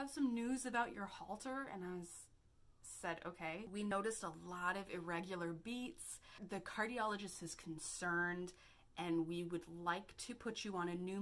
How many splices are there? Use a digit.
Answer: 2